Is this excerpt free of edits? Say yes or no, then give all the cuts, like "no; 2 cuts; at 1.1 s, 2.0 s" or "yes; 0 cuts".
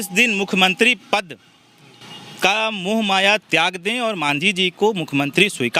yes; 0 cuts